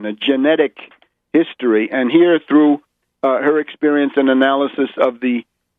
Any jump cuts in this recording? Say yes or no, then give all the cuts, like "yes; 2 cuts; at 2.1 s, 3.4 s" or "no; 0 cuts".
yes; 1 cut; at 4.1 s